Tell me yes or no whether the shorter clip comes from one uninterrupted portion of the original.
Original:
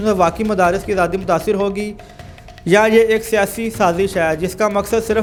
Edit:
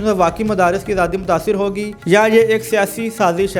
no